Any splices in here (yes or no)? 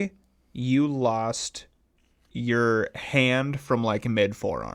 no